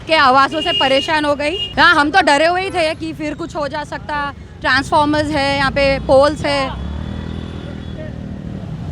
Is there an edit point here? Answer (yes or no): yes